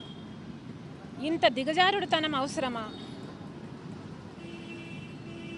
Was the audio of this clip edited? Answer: no; 0 cuts

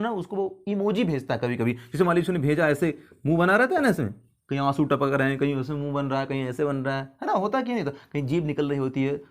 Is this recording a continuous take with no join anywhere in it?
yes; 0 cuts

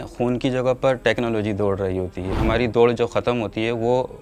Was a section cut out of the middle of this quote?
yes; 1 cut; at 2.3 s

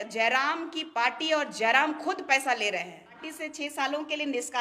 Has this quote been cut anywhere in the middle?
yes; 1 cut; at 3.3 s

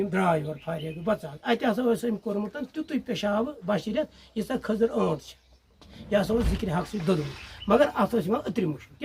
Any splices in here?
no; 0 cuts

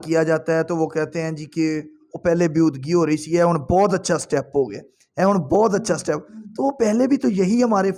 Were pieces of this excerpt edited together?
no; 0 cuts

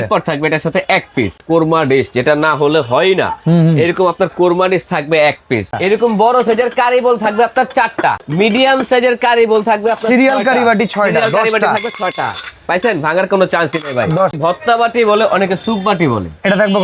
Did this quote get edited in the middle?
yes; 4 cuts; at 1.4 s, 5.8 s, 8.2 s, 14.4 s

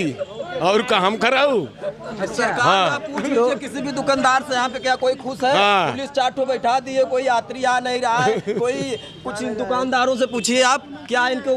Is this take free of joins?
yes; 0 cuts

